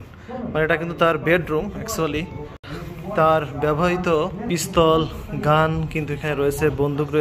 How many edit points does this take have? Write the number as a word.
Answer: two